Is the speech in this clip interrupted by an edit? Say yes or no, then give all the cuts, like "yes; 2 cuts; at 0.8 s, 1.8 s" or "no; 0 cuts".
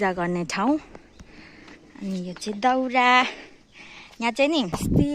no; 0 cuts